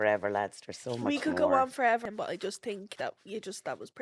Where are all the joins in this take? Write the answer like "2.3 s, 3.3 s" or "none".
2.0 s